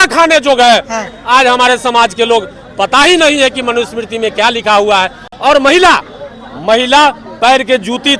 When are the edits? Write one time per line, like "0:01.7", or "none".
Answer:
none